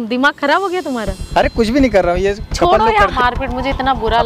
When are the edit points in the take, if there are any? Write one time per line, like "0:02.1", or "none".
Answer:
0:03.1